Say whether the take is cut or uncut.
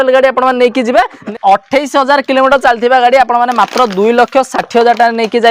cut